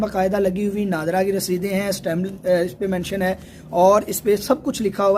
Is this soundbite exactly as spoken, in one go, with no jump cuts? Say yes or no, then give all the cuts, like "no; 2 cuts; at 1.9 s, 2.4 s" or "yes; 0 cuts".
yes; 0 cuts